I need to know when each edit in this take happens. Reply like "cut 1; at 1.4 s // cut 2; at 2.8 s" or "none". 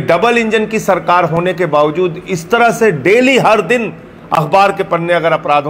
none